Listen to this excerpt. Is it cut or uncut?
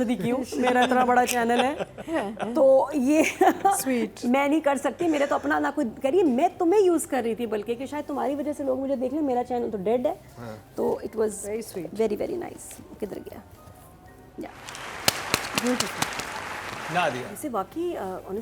uncut